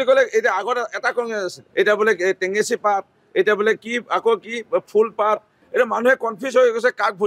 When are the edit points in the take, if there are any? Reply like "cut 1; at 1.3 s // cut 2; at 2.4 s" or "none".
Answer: cut 1; at 1.6 s // cut 2; at 5.6 s